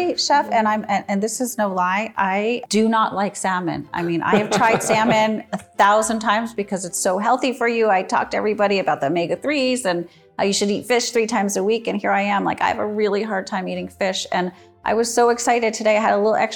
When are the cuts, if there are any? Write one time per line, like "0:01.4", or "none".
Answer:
0:02.6